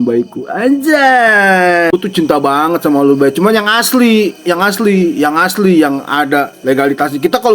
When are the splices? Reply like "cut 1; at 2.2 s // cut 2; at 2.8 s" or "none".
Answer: cut 1; at 1.9 s